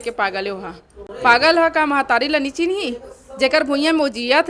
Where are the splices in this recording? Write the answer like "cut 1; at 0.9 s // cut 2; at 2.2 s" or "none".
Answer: none